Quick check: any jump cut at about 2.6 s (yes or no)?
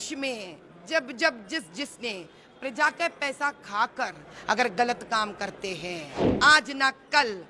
no